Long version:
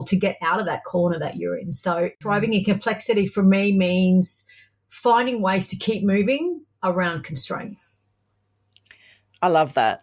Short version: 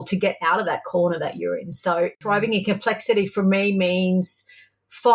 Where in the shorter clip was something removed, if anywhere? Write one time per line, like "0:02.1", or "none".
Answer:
none